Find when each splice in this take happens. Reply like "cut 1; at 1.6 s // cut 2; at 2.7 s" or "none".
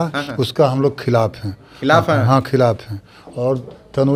none